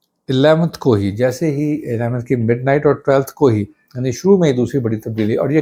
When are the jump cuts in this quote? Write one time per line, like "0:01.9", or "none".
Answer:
none